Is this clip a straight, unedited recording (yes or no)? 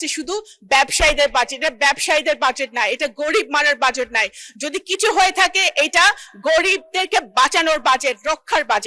yes